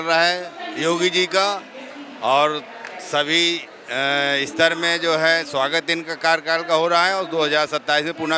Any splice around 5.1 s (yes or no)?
no